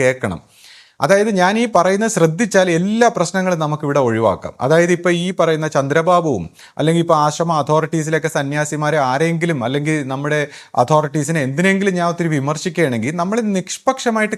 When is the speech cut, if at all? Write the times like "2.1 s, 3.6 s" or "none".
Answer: none